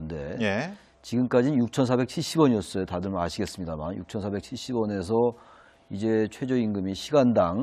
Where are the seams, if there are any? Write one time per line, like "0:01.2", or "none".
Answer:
0:06.3

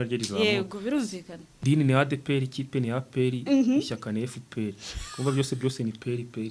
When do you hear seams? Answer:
0:01.5

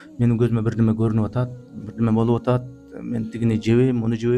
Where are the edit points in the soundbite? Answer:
none

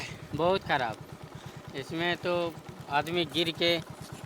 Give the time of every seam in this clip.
none

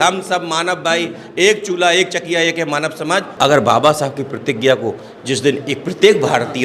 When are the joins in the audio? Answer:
0:03.3

